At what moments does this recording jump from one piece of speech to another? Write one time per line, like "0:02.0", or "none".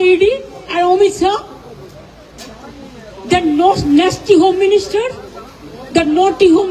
none